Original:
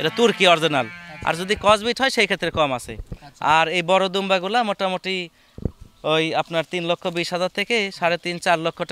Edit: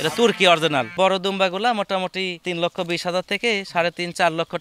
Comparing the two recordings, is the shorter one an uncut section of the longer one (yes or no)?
no